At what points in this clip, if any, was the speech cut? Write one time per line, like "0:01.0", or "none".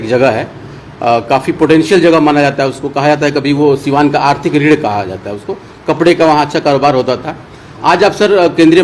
none

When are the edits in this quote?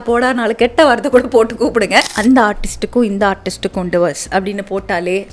0:02.1

